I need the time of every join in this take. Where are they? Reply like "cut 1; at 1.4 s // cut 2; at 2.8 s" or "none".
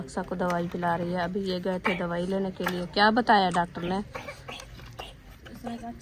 cut 1; at 4.1 s